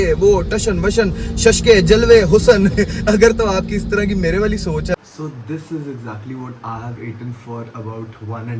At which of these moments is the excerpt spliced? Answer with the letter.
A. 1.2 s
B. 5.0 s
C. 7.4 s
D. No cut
B